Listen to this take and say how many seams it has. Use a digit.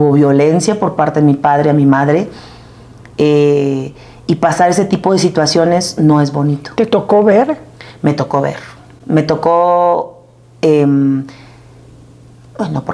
0